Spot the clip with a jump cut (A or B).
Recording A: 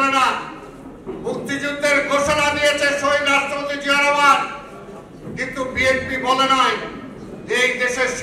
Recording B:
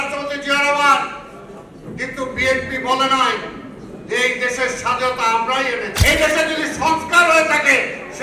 B